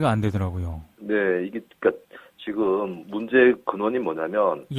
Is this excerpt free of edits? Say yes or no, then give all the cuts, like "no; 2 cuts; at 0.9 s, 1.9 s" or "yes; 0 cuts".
yes; 0 cuts